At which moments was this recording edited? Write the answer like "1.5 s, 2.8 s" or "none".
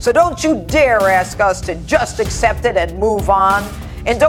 none